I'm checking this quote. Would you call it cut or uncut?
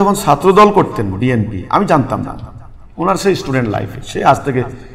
uncut